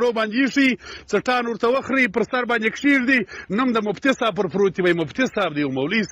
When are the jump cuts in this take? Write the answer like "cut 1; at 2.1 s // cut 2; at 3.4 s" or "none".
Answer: none